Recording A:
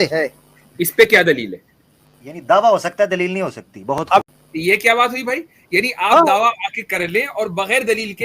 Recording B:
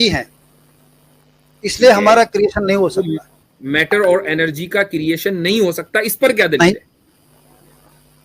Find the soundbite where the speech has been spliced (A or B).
A